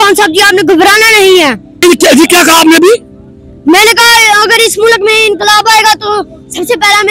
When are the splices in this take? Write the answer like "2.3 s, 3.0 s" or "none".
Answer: 1.8 s